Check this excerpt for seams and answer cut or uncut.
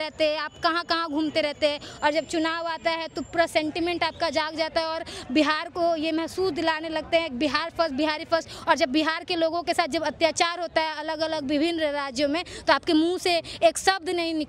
uncut